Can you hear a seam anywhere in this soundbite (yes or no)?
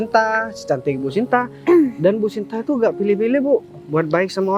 no